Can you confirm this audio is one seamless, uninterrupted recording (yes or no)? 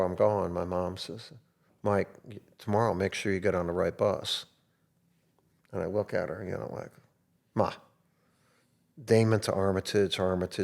yes